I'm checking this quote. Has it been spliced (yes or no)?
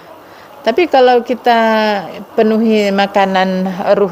no